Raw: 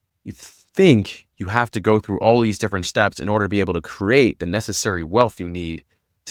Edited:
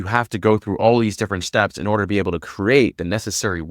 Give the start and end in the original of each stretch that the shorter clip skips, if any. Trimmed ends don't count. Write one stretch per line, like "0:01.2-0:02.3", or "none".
none

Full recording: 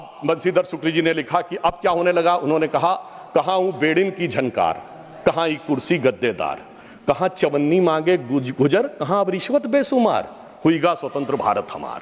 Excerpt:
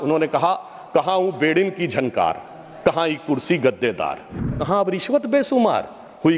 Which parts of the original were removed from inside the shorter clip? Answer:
0:06.9-0:08.9

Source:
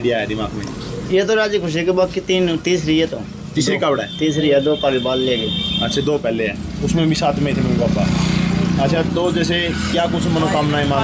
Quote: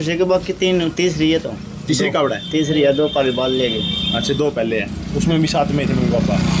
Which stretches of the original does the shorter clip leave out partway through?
none

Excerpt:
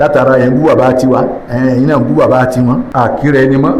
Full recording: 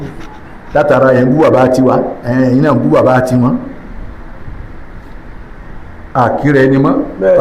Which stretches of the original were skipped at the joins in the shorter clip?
0:03.6-0:06.1

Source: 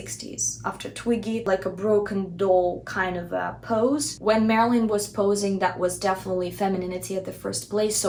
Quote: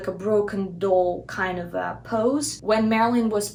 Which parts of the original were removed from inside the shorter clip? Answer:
none

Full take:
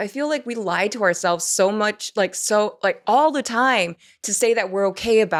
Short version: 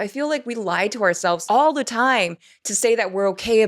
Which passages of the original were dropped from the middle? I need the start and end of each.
0:01.4-0:03.0

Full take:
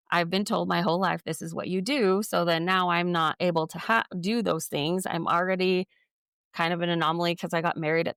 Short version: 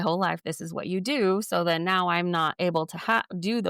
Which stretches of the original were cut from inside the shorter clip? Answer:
none

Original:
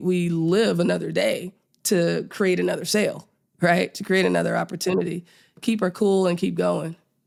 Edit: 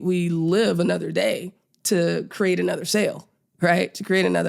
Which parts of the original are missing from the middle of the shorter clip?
none

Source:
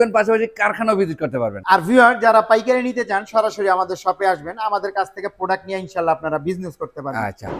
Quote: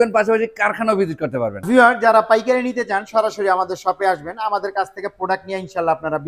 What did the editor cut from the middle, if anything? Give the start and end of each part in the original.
0:01.6-0:01.8

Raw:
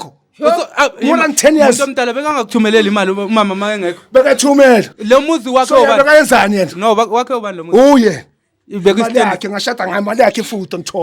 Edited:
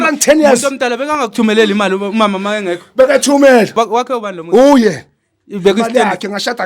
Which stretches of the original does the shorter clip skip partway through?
0:04.9-0:07.0

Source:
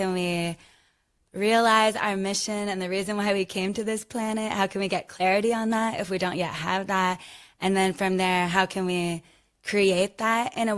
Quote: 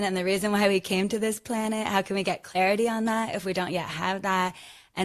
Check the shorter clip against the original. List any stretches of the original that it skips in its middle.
none

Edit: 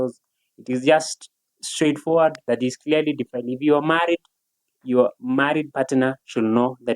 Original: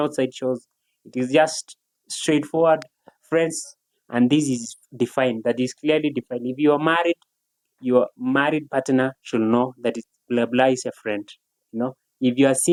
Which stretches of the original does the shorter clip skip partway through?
0:02.9-0:05.4

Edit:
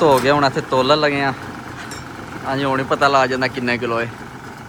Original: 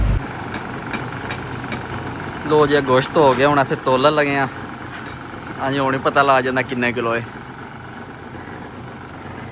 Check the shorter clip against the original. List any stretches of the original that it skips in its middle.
none

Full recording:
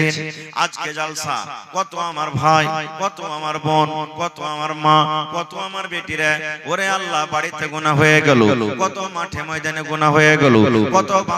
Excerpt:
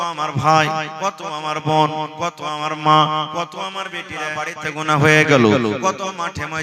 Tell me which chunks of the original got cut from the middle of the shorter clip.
0:06.3-0:07.3

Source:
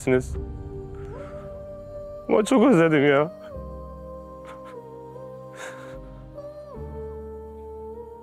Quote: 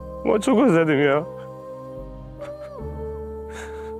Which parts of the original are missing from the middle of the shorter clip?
0:03.3-0:05.2

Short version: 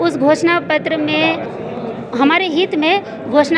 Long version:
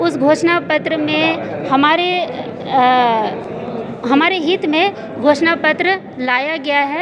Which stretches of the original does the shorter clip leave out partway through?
0:01.5-0:03.4

